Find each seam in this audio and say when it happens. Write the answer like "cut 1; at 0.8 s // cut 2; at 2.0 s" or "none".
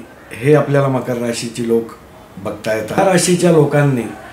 cut 1; at 3.0 s